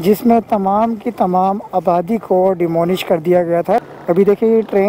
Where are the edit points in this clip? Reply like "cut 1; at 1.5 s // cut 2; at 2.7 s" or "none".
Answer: cut 1; at 3.8 s